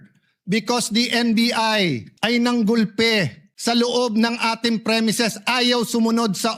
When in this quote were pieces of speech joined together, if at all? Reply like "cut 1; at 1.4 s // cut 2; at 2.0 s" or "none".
cut 1; at 2.1 s // cut 2; at 3.4 s